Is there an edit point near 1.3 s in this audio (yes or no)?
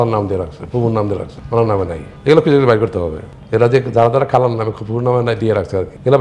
yes